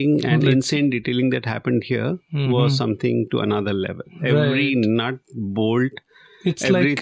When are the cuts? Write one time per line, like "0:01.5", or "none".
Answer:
none